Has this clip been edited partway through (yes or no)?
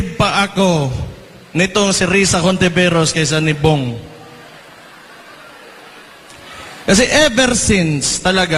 no